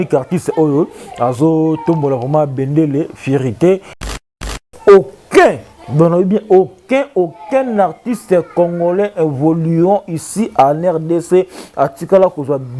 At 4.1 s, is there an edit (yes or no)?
yes